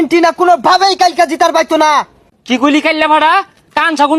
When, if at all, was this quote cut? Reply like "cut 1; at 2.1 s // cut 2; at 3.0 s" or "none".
cut 1; at 2.2 s